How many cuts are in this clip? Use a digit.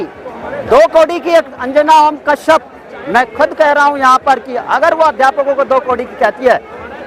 0